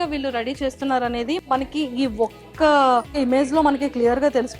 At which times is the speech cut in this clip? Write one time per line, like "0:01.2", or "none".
0:03.1